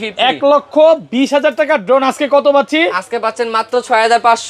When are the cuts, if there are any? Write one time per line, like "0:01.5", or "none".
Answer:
none